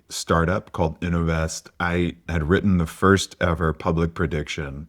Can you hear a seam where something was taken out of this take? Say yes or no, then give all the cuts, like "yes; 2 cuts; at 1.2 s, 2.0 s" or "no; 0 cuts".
yes; 1 cut; at 2.2 s